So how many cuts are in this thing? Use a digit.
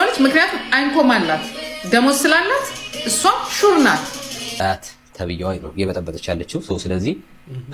1